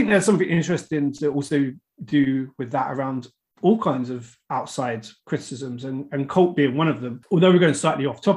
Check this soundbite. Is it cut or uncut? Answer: cut